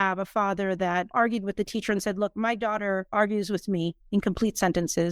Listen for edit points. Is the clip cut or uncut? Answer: cut